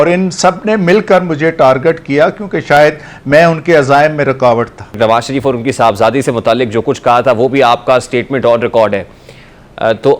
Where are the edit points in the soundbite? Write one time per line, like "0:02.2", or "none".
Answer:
0:05.0